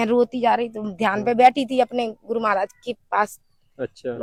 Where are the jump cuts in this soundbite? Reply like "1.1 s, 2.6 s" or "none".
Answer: none